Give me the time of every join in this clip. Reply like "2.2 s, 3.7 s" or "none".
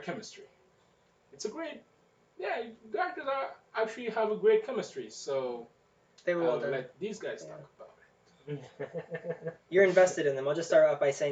3.2 s